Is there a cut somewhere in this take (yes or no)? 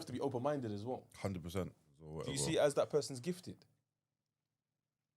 yes